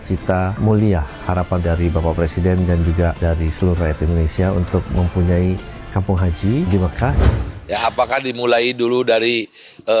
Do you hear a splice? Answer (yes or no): yes